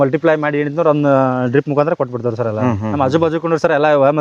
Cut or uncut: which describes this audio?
cut